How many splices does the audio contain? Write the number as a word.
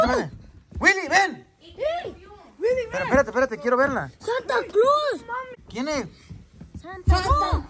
one